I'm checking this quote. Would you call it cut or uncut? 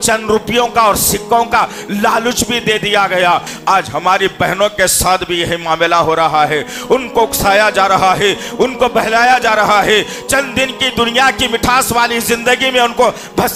cut